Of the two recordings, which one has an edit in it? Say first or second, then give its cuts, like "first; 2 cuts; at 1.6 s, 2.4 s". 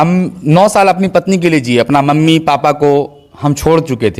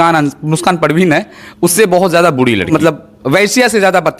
second; 1 cut; at 2.7 s